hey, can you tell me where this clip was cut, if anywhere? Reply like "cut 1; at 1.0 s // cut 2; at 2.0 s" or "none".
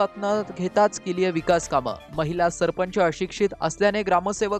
none